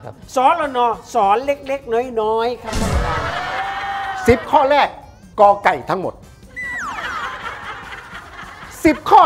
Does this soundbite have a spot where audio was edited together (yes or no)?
yes